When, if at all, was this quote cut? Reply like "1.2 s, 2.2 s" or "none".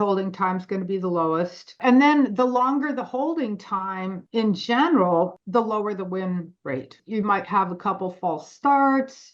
1.7 s, 4.2 s, 5.3 s, 7.0 s